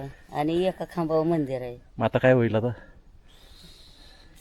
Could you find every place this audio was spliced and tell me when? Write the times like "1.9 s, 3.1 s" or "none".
none